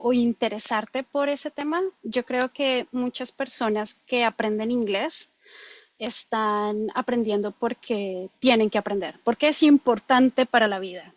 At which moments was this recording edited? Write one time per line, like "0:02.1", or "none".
none